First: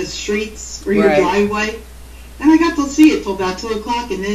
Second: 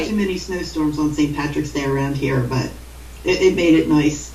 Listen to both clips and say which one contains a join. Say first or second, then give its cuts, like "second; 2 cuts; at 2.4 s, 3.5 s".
first; 1 cut; at 2.5 s